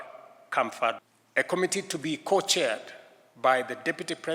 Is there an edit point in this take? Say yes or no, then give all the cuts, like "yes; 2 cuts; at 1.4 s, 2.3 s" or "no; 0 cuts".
yes; 1 cut; at 1.1 s